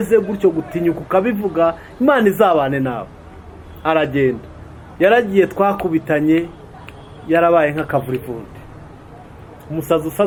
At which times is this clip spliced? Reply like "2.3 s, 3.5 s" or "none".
none